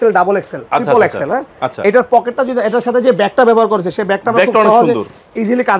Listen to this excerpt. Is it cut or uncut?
uncut